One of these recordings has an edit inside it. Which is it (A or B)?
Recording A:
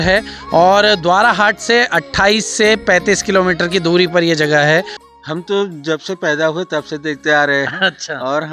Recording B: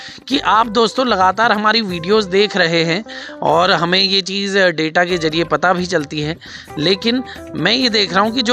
A